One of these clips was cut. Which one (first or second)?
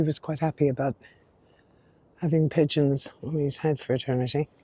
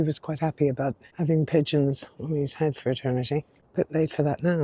second